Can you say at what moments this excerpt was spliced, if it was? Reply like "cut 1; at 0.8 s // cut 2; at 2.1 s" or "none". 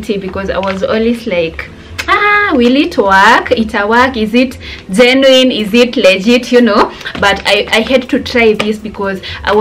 none